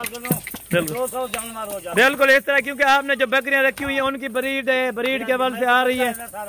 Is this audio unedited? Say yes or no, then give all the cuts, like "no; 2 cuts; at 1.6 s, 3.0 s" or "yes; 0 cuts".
yes; 0 cuts